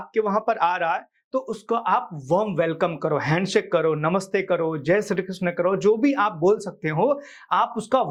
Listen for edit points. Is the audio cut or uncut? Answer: uncut